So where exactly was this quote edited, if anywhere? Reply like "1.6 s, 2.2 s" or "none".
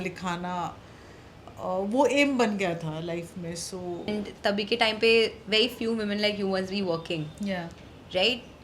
4.1 s